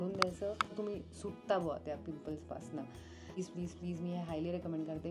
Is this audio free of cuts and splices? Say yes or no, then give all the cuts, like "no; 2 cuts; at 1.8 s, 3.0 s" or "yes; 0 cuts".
no; 2 cuts; at 0.7 s, 3.4 s